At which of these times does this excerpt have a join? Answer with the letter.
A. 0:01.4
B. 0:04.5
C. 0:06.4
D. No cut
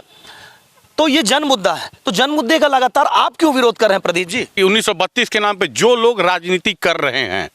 B